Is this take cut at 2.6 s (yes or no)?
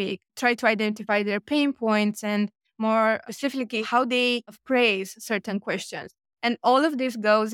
no